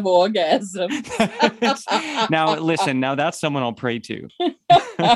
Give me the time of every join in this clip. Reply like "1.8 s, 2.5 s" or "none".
4.2 s